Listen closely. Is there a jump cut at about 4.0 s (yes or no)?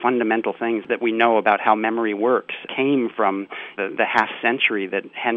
no